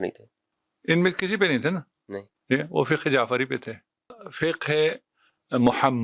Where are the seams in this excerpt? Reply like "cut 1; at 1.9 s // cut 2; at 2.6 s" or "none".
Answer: cut 1; at 4.1 s